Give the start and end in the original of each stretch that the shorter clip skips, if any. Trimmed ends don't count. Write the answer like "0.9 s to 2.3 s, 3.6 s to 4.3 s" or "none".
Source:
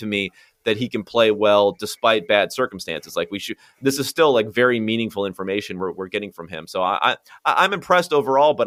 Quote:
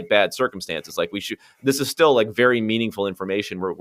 none